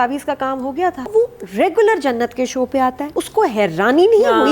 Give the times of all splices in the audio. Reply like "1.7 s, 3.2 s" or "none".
1.0 s, 3.0 s